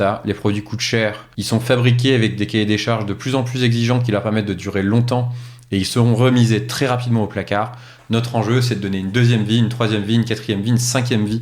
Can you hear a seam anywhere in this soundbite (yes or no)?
yes